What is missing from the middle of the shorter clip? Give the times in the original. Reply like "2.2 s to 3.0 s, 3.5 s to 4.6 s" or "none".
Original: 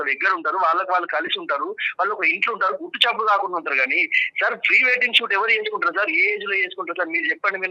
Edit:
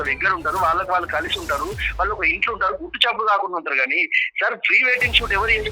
none